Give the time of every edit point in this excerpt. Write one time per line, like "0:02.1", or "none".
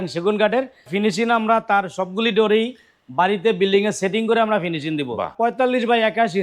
0:00.9
0:05.3